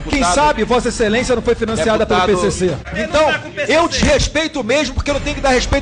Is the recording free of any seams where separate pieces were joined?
no; 1 cut; at 2.8 s

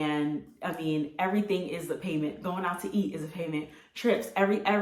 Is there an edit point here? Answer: no; 0 cuts

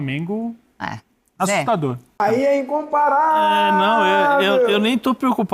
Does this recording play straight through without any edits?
no; 1 cut; at 2.1 s

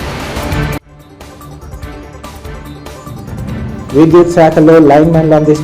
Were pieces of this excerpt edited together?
no; 0 cuts

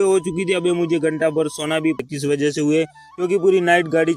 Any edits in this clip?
yes; 1 cut; at 2.0 s

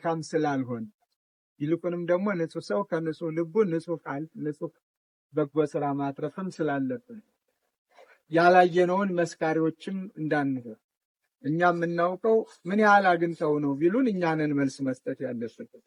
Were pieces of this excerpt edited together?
no; 0 cuts

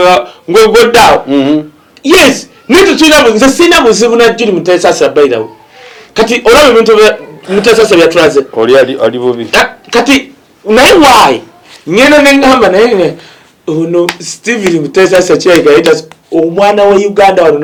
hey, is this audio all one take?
yes; 0 cuts

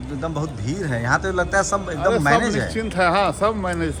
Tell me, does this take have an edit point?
no; 0 cuts

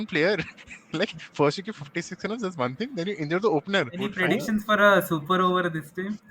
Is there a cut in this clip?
yes; 1 cut; at 4.3 s

